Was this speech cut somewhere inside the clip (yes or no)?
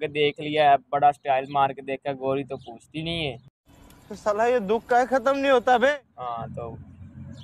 no